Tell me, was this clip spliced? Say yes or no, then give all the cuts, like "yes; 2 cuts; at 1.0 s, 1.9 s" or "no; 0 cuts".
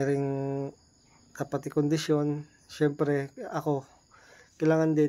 no; 0 cuts